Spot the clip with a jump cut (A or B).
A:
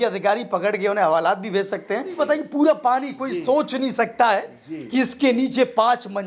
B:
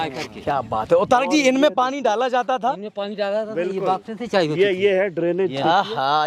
A